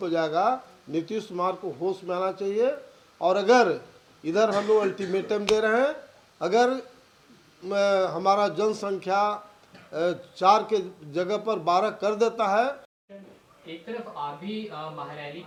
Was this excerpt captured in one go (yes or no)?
yes